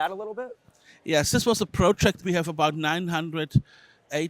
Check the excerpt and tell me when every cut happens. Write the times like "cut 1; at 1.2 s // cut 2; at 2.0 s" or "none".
cut 1; at 2.2 s